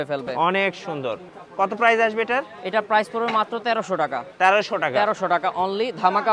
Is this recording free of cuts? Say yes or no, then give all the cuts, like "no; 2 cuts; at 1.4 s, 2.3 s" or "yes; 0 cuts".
yes; 0 cuts